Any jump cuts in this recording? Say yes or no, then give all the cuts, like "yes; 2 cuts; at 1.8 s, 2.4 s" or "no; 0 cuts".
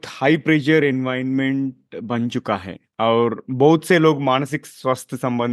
no; 0 cuts